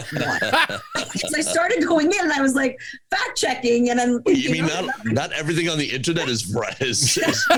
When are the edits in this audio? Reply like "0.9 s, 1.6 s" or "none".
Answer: none